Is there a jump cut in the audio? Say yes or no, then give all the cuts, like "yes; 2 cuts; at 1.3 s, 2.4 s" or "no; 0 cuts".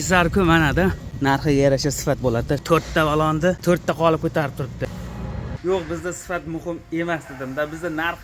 yes; 4 cuts; at 1.1 s, 2.6 s, 3.6 s, 5.4 s